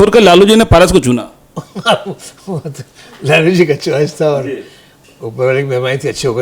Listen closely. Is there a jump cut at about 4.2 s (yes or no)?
no